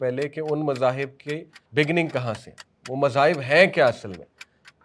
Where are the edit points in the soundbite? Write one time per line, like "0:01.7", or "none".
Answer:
0:01.5